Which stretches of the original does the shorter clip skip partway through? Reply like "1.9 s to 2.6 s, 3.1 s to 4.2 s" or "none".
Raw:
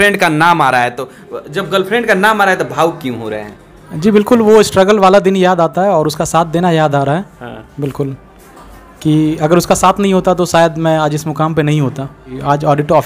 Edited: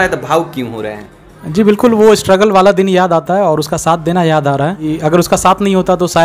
7.3 s to 9.2 s